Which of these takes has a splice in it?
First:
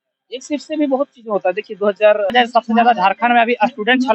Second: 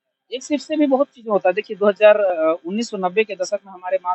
first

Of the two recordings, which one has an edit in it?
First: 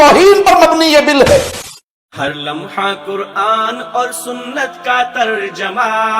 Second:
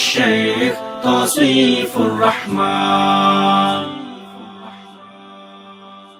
first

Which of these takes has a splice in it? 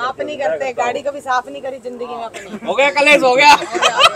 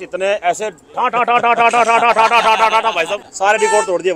second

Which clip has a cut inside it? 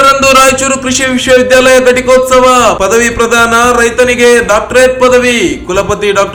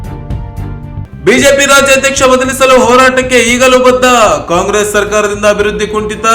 second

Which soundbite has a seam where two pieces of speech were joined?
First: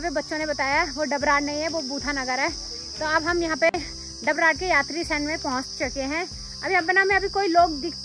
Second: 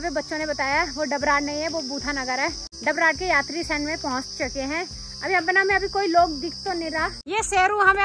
second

